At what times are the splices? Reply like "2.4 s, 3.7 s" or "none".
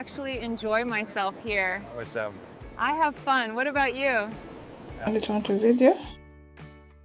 none